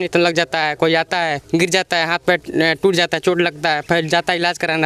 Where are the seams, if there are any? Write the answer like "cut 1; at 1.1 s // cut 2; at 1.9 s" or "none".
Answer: none